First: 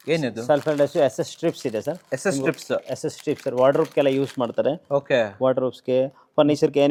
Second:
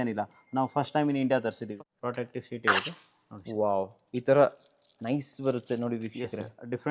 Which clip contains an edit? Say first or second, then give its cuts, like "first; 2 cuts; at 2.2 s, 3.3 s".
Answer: second; 1 cut; at 1.6 s